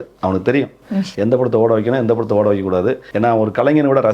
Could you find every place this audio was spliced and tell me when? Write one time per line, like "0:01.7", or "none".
0:03.0